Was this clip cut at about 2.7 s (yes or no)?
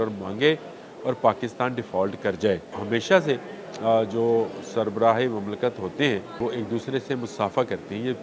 yes